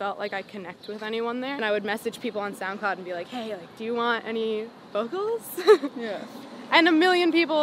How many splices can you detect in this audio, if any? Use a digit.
1